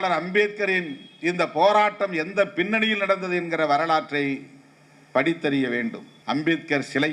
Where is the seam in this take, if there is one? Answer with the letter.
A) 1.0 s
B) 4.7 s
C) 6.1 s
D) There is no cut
C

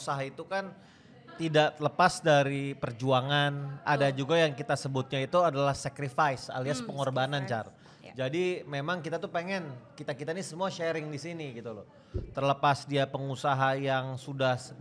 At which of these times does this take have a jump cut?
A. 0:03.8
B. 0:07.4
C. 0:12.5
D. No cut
D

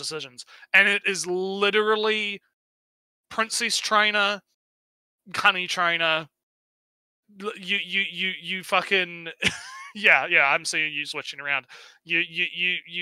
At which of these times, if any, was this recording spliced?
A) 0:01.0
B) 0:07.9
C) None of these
C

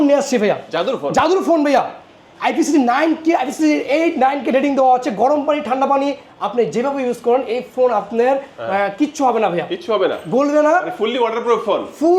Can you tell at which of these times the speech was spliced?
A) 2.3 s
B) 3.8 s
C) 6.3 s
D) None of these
D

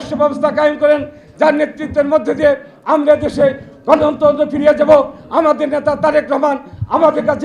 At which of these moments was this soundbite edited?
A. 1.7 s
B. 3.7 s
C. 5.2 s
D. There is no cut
D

